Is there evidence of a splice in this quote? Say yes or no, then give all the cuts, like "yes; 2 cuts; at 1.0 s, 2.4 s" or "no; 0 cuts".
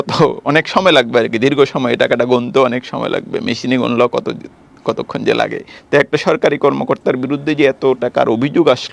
yes; 1 cut; at 5.7 s